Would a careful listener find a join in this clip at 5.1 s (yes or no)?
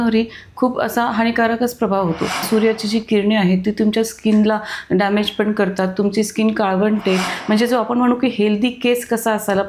no